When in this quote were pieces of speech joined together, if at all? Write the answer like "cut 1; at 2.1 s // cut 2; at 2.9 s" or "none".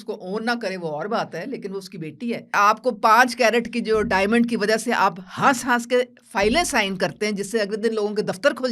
cut 1; at 2.5 s